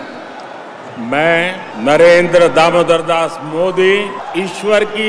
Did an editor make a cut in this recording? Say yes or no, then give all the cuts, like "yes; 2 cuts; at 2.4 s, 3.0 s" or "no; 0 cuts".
yes; 2 cuts; at 1.7 s, 4.2 s